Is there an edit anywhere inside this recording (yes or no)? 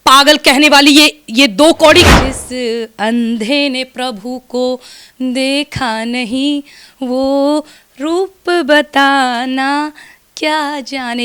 yes